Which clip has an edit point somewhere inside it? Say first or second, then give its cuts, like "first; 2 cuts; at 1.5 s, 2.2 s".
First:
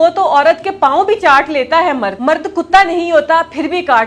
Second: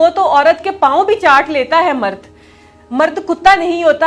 first; 1 cut; at 2.1 s